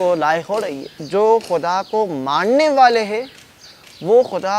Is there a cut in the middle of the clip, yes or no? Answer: yes